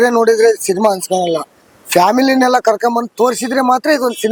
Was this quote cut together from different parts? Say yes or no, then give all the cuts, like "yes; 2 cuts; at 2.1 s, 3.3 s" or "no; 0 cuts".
no; 0 cuts